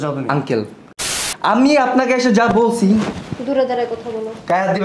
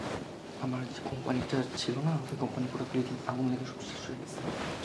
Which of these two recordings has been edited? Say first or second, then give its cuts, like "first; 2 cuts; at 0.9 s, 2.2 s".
first; 1 cut; at 0.9 s